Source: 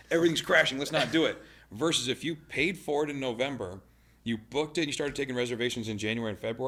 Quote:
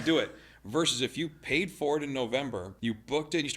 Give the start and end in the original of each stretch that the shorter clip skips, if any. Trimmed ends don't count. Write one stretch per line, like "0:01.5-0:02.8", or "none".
0:03.7-0:04.1